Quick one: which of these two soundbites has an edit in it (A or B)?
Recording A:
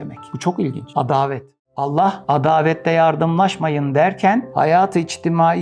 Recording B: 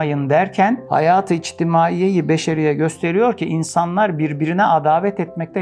A